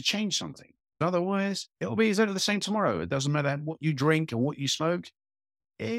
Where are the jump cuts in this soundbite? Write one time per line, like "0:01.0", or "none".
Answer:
0:01.0